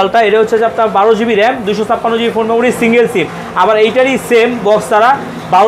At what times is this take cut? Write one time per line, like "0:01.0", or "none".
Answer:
none